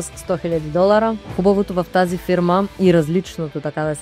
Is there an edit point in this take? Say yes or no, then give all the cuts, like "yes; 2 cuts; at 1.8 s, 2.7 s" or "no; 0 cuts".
yes; 1 cut; at 1.2 s